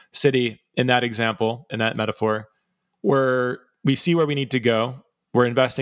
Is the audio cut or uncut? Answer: cut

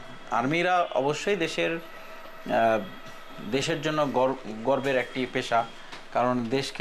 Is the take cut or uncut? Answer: uncut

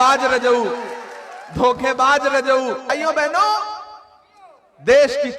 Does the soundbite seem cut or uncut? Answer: cut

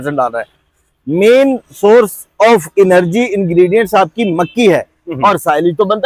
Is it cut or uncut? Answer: uncut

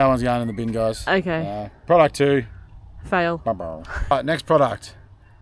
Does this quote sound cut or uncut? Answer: uncut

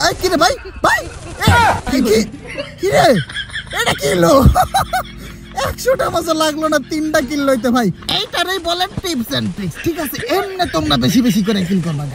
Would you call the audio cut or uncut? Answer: uncut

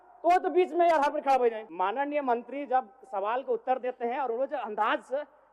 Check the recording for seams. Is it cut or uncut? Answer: cut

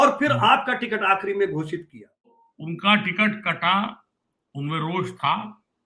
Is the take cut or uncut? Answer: cut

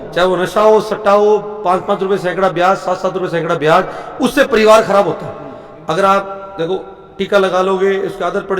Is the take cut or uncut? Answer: uncut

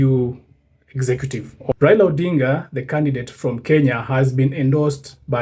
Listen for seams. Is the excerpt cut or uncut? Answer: cut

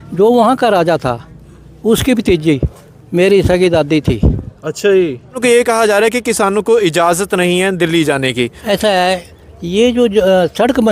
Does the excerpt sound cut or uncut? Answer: cut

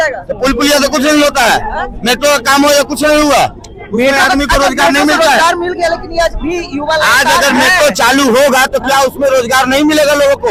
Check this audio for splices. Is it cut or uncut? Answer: uncut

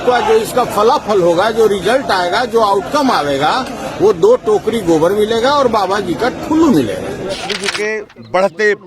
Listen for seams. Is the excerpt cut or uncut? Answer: cut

